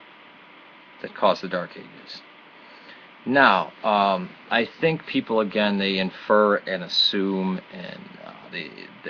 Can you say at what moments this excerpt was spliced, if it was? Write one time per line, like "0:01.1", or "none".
0:07.3